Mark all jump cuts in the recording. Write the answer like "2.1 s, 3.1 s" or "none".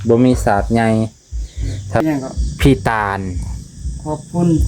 2.0 s